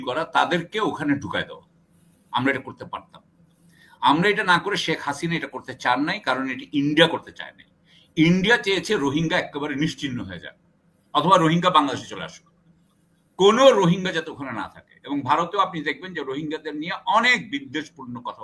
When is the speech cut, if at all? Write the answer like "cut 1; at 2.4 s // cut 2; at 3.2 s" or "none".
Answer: none